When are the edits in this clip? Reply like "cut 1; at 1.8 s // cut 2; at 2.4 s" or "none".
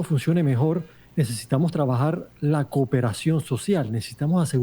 cut 1; at 1.0 s